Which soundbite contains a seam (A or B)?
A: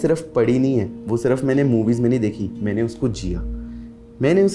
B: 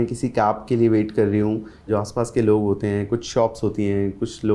B